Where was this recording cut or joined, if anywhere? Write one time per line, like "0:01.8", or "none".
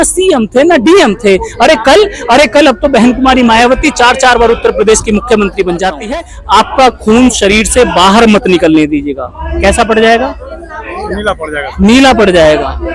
0:05.8

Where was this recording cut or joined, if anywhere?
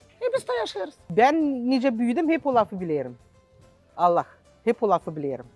0:01.0

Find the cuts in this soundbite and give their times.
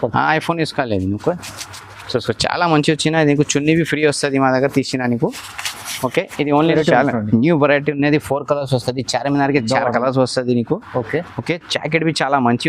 0:06.6

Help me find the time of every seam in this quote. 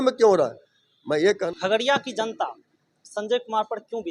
0:01.4

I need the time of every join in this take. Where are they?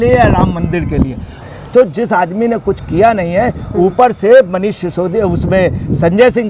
0:01.3

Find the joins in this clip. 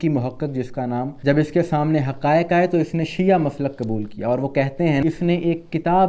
0:01.1
0:05.0

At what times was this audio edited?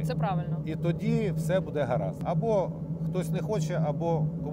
0:02.2

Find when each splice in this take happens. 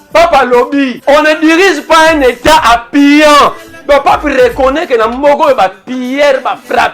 0:01.0

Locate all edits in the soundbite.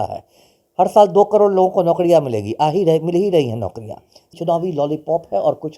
0:04.3

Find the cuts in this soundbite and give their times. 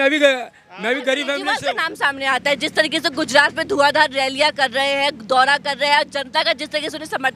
0:01.5

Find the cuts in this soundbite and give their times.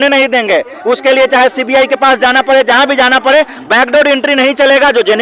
none

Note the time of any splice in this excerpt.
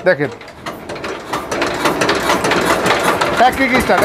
none

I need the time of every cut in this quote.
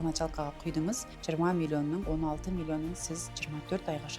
0:01.1
0:02.1

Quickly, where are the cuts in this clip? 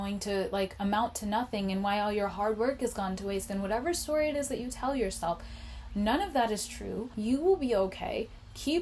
0:07.0

